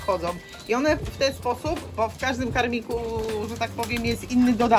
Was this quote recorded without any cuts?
yes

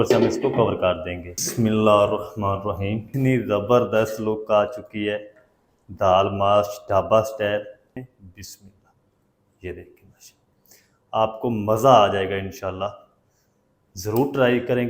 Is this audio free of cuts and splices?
no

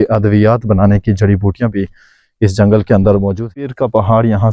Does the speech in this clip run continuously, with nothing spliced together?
no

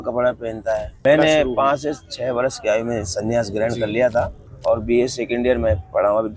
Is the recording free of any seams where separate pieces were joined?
no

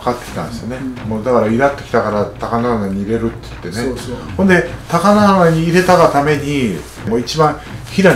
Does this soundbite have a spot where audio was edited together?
yes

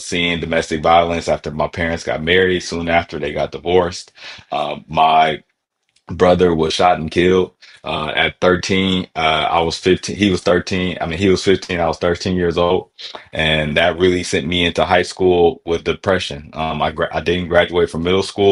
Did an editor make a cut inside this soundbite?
no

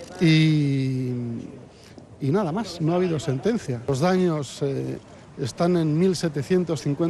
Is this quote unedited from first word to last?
no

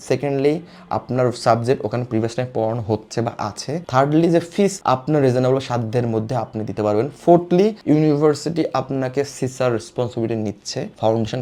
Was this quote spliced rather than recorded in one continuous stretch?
no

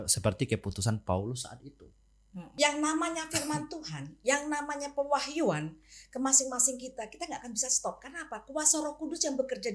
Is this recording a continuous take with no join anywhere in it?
no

